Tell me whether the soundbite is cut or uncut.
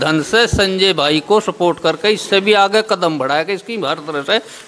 uncut